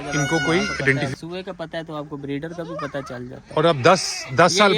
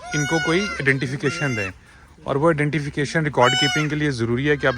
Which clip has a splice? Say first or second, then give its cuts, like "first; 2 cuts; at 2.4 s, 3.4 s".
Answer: first; 1 cut; at 1.1 s